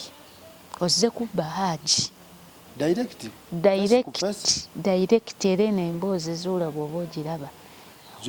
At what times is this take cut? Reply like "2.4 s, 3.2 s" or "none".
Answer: none

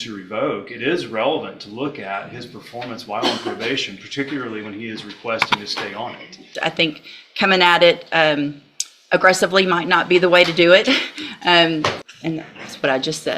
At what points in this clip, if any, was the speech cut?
6.5 s, 12.0 s

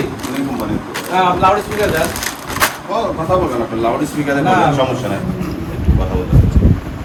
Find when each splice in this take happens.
none

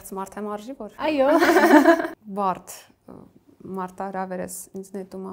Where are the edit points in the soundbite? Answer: 1.0 s, 2.3 s

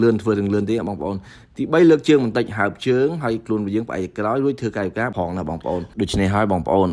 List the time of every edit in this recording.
5.1 s

